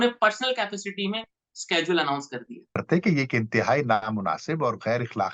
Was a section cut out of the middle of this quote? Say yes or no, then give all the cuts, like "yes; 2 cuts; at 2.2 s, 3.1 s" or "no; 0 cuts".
yes; 1 cut; at 2.8 s